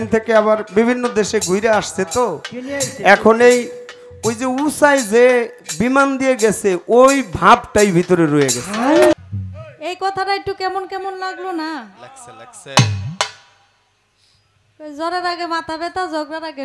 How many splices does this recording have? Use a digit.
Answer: 1